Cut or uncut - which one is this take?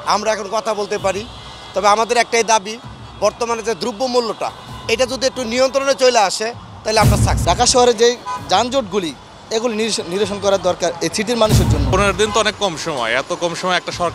cut